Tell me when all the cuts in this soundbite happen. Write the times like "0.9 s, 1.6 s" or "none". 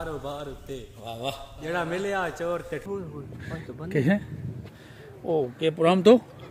2.8 s